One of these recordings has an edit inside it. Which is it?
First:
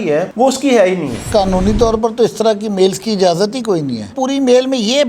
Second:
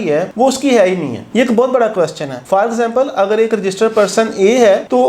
first; 1 cut; at 1.3 s

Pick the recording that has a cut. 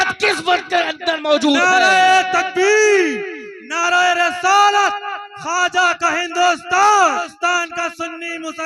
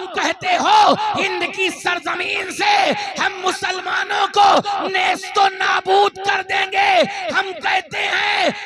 first; 1 cut; at 7.3 s

